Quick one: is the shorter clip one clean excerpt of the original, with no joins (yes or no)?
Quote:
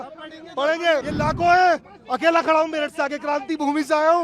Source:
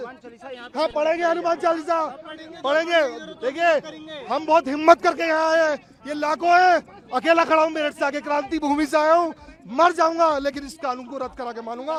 no